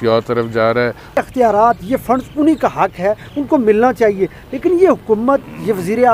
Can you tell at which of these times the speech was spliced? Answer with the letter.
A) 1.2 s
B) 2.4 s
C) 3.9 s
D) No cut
A